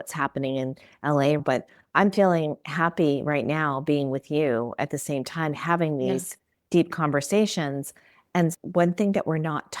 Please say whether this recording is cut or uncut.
cut